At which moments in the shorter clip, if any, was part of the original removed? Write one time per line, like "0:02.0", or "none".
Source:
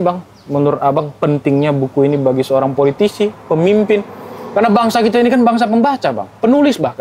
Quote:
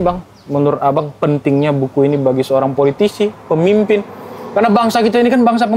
none